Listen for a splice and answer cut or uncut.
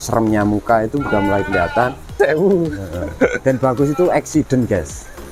cut